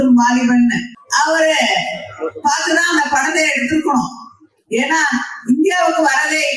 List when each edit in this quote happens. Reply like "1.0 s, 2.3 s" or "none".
1.0 s